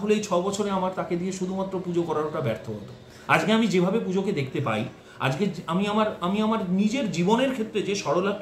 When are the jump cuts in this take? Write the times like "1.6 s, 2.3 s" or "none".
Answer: none